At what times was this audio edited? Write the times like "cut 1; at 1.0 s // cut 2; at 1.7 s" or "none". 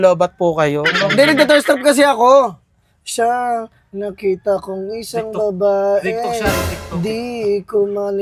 none